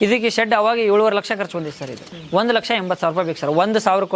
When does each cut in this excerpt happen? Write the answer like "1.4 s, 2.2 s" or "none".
2.1 s